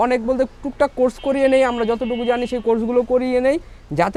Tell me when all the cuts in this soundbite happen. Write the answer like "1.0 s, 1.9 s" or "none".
none